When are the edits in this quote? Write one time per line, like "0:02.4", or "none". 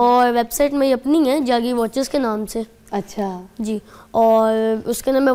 none